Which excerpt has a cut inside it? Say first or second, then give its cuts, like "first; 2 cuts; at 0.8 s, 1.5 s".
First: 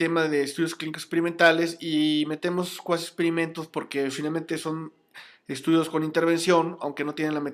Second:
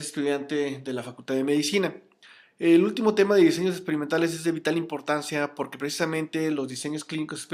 second; 1 cut; at 2.1 s